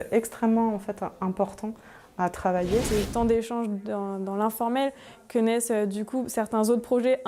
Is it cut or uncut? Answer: cut